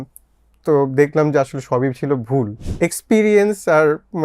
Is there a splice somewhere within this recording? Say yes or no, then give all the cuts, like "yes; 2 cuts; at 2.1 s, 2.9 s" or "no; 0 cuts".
yes; 1 cut; at 2.6 s